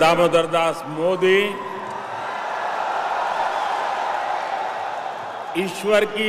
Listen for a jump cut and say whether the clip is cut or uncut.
uncut